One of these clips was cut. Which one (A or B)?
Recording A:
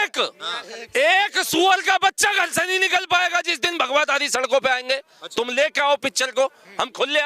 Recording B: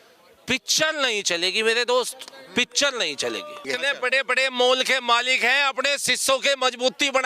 B